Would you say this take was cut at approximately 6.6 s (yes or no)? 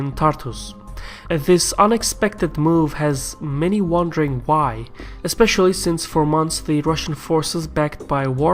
yes